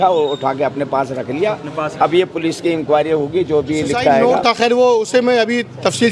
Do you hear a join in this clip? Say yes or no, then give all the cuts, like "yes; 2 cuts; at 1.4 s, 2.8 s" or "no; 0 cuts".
yes; 1 cut; at 4.2 s